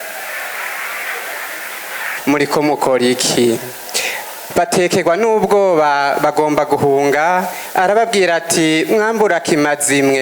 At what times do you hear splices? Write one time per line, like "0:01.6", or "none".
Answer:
0:02.1